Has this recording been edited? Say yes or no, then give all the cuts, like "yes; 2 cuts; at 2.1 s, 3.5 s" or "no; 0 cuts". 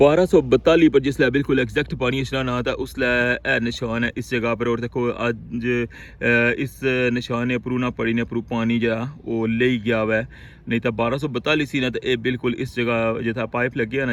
no; 0 cuts